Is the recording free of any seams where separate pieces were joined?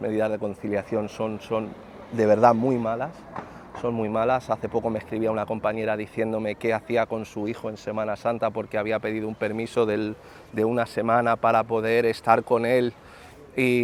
yes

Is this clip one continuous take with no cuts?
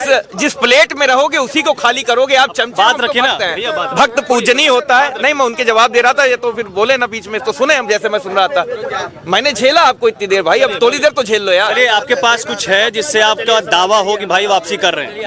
yes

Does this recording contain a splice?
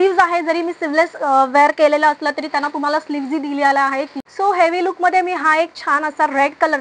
yes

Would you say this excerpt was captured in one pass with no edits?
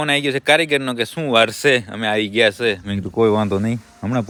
yes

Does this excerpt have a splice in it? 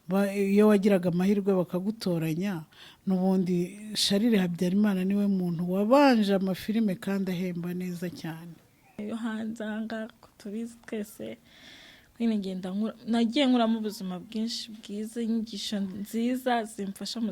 yes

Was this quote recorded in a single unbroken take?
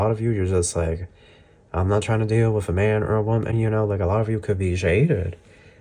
yes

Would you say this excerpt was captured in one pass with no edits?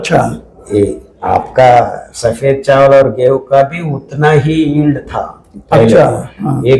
yes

